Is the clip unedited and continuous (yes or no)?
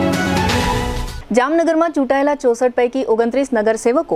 no